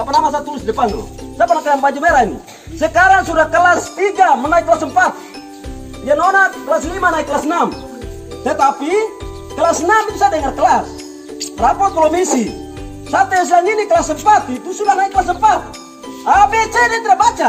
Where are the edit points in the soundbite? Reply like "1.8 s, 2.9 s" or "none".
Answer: none